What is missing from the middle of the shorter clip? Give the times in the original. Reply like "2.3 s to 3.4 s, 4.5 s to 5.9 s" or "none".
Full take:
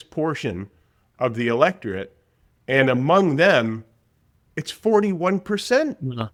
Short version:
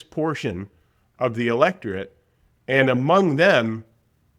none